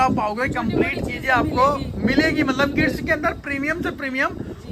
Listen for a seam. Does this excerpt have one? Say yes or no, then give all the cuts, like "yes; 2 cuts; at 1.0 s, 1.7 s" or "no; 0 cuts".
no; 0 cuts